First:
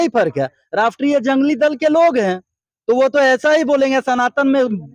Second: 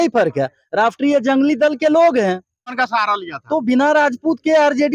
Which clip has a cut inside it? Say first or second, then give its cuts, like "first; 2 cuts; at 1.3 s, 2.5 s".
second; 1 cut; at 2.8 s